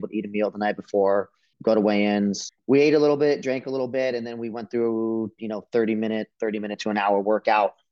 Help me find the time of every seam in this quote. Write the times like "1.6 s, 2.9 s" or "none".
1.4 s, 2.5 s